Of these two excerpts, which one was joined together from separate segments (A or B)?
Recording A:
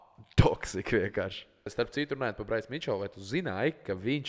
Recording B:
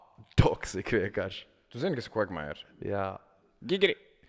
A